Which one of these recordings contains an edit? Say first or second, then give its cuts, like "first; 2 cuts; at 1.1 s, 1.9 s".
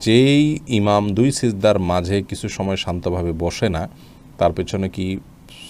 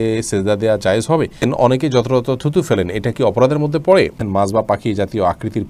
second; 2 cuts; at 1.4 s, 4.2 s